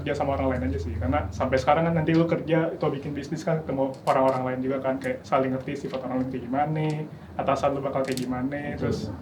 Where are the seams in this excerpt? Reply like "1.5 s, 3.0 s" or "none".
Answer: none